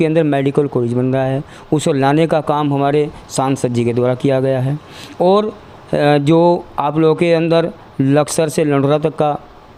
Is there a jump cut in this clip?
no; 0 cuts

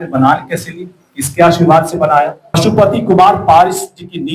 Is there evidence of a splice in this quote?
yes; 1 cut; at 2.6 s

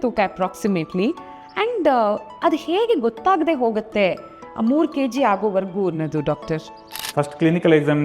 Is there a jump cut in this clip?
yes; 1 cut; at 6.9 s

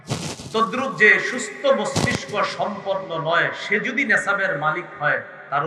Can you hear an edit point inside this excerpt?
no; 0 cuts

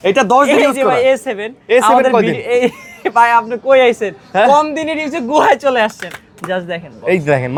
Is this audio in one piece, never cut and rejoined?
yes; 0 cuts

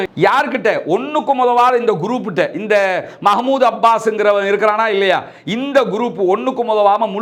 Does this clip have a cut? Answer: no; 0 cuts

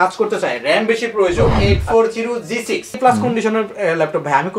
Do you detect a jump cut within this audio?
yes; 2 cuts; at 1.5 s, 3.0 s

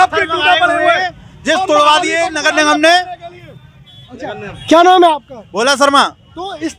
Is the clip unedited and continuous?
yes; 0 cuts

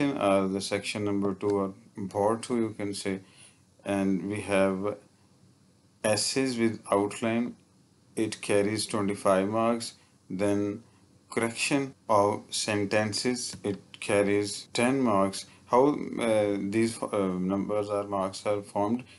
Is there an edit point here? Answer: yes; 3 cuts; at 12.0 s, 13.5 s, 14.6 s

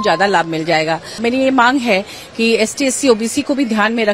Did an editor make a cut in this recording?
yes; 1 cut; at 1.2 s

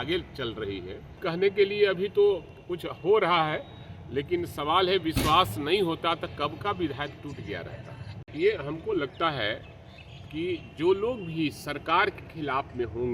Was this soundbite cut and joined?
yes; 2 cuts; at 1.2 s, 8.2 s

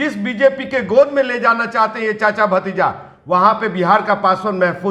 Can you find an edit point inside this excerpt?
no; 0 cuts

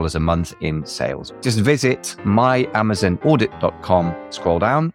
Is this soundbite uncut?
no; 1 cut; at 1.3 s

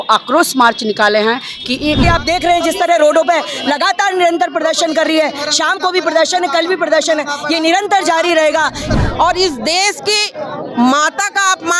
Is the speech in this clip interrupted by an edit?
yes; 2 cuts; at 2.0 s, 8.8 s

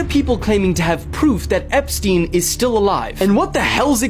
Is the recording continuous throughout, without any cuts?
yes; 0 cuts

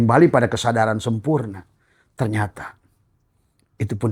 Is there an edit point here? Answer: no; 0 cuts

